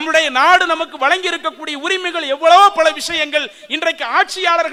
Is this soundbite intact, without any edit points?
yes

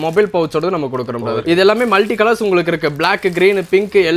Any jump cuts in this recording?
no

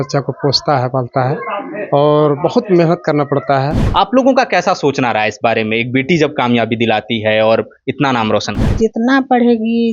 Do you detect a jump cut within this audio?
yes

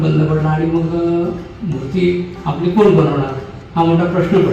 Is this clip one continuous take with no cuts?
yes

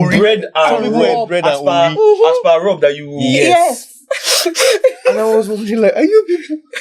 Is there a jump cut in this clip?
no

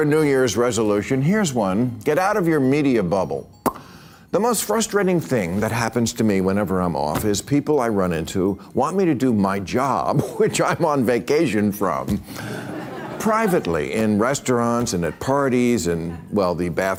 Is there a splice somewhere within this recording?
no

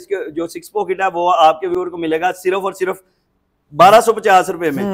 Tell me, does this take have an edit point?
no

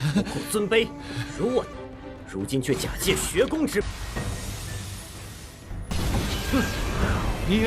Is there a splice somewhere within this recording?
yes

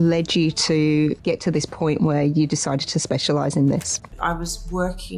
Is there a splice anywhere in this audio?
yes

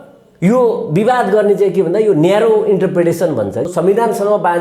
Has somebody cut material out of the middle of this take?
yes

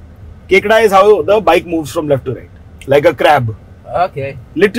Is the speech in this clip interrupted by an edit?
no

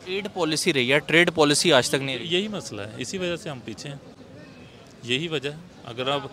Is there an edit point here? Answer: no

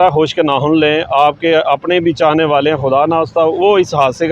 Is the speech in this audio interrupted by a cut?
no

